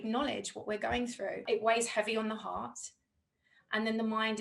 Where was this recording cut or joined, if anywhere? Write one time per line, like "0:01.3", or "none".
0:01.4